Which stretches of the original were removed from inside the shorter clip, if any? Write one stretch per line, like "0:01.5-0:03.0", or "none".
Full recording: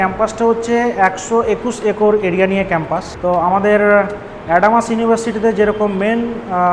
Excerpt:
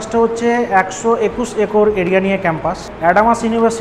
0:03.1-0:04.3